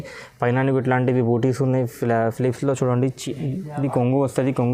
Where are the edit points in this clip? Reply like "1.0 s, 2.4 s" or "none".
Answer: none